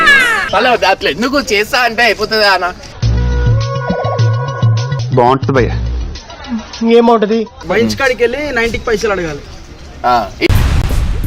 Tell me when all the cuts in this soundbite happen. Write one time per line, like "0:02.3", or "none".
0:07.6